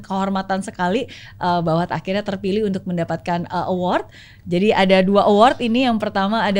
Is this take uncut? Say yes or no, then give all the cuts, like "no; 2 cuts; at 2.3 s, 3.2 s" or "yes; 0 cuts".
yes; 0 cuts